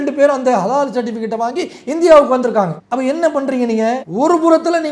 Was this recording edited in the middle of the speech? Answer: yes; 2 cuts; at 2.8 s, 4.1 s

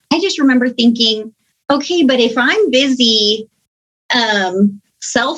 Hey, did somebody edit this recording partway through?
no; 0 cuts

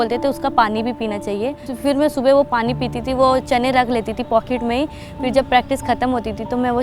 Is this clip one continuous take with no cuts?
no; 1 cut; at 1.6 s

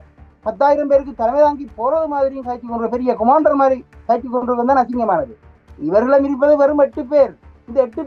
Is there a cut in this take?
no; 0 cuts

